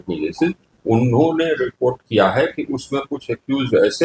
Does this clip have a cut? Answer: no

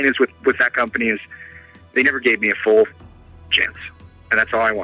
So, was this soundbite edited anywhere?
no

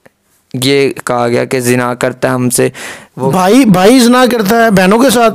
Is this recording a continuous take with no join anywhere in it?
yes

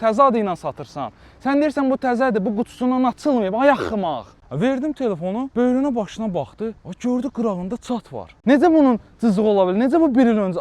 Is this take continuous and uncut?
no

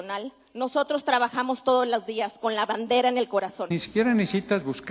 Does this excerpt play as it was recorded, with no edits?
no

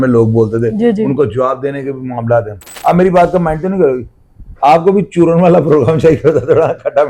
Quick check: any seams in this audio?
yes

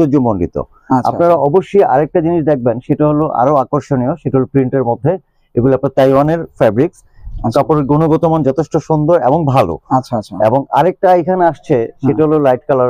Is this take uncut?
yes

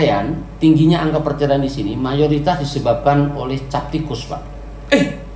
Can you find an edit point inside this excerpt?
no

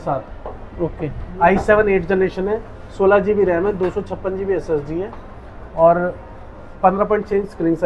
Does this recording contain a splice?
no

